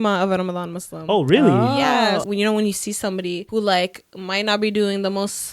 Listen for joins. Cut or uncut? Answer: cut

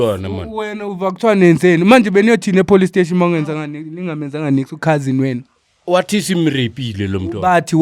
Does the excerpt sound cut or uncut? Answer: uncut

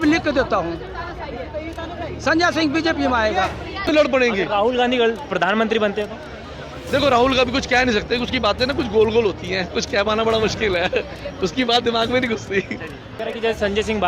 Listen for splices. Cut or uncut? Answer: cut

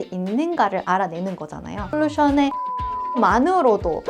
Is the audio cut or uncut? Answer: cut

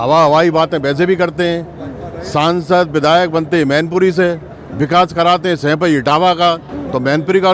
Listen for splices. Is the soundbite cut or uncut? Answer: uncut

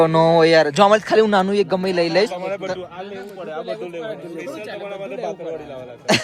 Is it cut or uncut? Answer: uncut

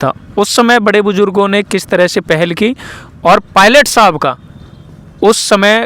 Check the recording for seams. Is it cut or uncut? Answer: uncut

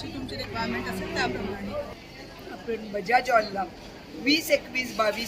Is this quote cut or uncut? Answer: cut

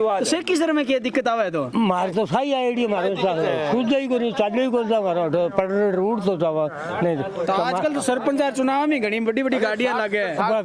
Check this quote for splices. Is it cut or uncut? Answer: uncut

